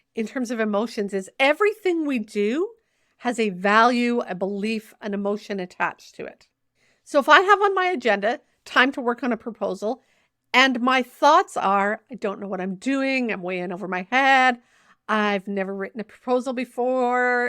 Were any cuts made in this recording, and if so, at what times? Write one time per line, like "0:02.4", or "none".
0:01.3